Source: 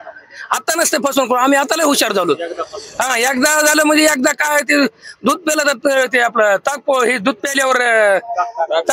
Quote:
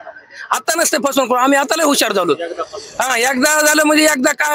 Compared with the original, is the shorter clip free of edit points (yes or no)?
yes